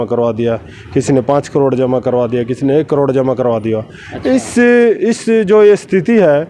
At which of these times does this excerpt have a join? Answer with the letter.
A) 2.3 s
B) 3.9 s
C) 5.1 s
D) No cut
D